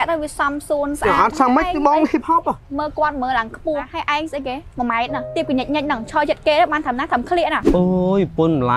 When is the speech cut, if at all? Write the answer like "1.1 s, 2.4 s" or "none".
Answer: 2.6 s, 4.0 s, 5.3 s, 7.6 s